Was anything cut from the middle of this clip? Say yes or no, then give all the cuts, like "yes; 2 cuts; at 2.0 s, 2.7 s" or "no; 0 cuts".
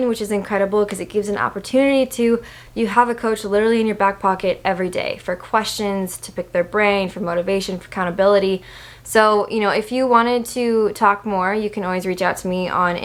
no; 0 cuts